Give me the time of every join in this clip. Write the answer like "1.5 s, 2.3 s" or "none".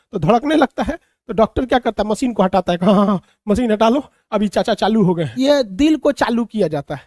5.3 s